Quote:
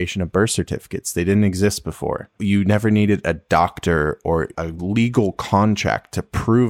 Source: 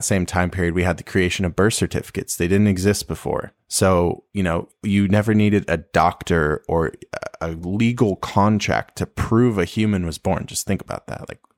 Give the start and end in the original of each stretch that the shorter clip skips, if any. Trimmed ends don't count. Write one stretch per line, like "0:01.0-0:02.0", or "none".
0:03.5-0:04.7
0:07.0-0:07.4